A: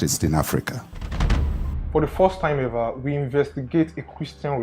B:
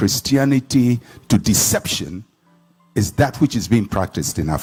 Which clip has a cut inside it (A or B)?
A